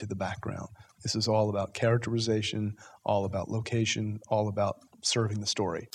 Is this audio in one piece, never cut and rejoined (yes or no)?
no